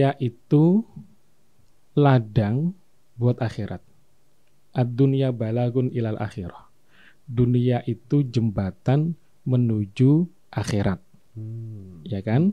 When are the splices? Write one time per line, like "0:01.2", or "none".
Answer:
none